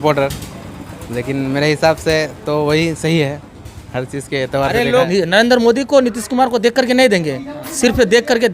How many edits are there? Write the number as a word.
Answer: one